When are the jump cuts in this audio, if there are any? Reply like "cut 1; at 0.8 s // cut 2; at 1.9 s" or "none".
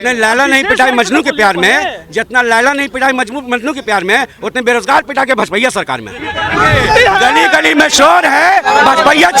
cut 1; at 6.5 s